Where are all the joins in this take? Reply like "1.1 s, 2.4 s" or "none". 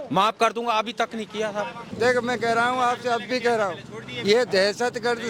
1.9 s